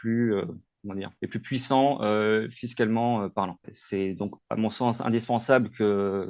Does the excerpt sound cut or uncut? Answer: uncut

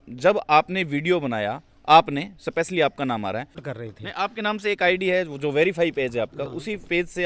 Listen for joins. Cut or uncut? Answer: cut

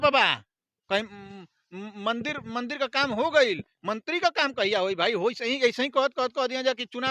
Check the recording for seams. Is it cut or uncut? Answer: uncut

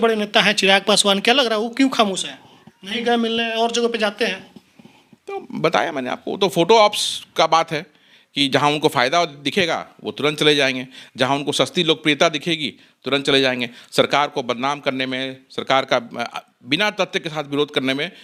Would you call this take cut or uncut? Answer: uncut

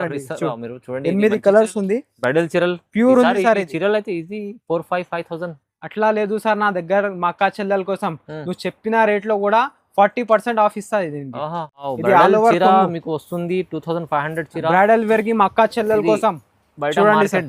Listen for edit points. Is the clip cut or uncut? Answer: cut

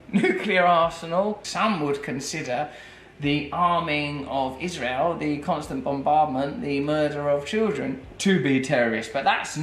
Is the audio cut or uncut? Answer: cut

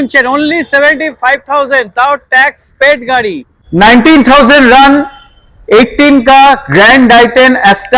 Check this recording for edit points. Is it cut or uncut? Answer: cut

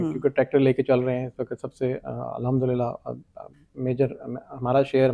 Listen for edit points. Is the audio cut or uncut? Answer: uncut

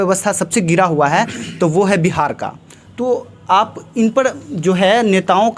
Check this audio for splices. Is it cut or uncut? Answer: uncut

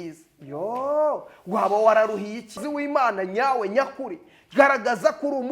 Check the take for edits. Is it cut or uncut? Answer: cut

